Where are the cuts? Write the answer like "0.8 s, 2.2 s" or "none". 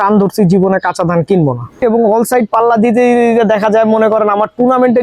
1.8 s